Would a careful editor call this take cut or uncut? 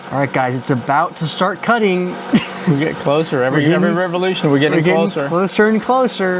uncut